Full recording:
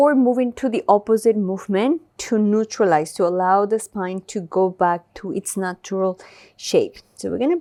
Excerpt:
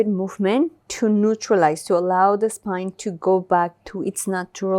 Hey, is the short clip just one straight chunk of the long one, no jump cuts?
yes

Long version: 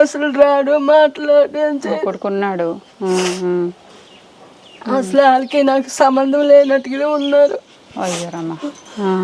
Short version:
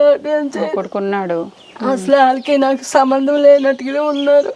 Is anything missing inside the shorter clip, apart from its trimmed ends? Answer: yes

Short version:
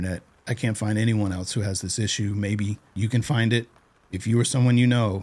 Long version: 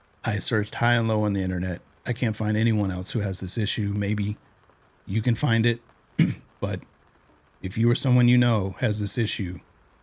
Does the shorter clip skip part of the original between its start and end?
yes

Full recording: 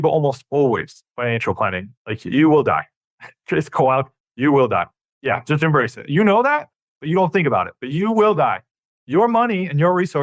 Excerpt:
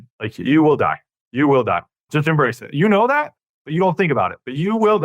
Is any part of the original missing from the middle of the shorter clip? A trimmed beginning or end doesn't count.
yes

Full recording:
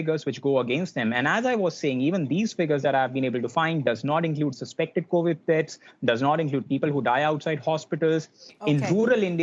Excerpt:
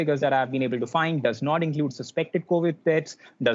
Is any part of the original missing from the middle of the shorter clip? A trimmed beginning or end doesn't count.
no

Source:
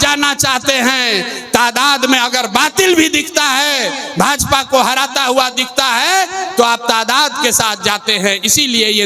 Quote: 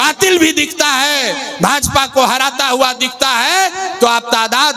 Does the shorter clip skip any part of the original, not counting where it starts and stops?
no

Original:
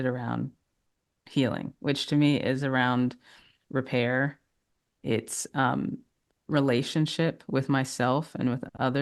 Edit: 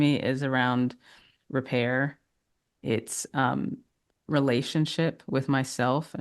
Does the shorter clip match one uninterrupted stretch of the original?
yes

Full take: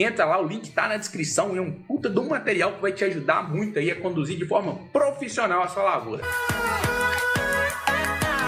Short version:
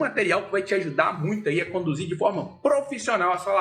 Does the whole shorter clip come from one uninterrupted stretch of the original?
yes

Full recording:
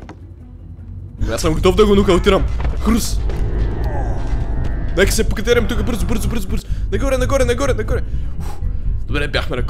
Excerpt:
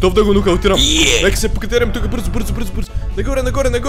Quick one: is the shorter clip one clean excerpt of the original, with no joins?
no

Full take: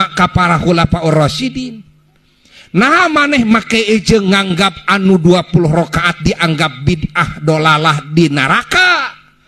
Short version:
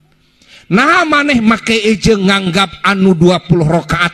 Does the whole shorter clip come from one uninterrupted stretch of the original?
yes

